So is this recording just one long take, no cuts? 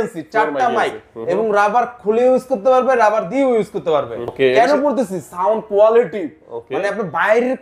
no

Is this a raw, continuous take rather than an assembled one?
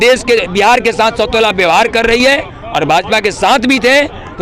yes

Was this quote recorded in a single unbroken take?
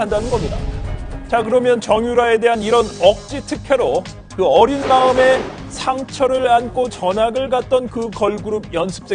no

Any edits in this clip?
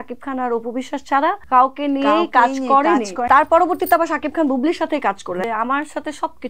yes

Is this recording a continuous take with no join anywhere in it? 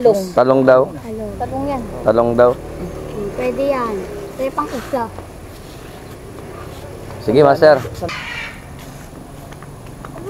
no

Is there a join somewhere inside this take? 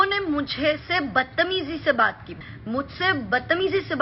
yes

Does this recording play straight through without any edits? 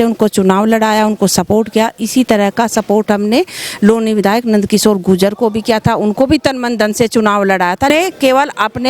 no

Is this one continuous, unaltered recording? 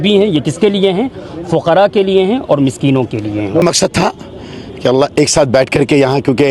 no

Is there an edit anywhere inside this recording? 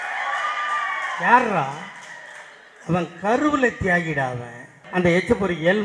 yes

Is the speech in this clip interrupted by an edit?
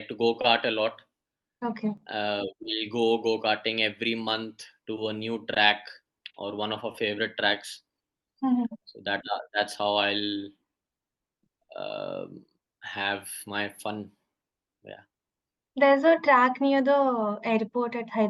no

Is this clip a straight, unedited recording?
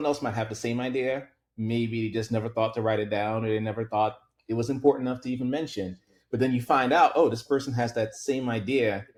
yes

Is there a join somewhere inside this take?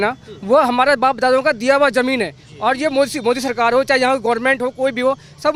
no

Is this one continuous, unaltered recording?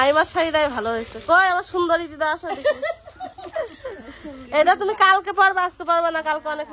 yes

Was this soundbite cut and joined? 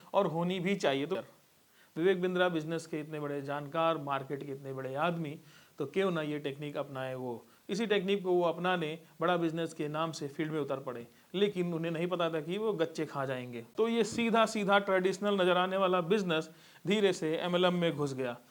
yes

